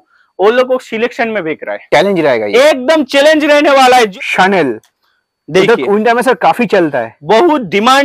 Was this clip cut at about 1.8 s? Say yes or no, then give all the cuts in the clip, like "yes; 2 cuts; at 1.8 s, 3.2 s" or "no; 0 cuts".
yes; 2 cuts; at 1.8 s, 4.1 s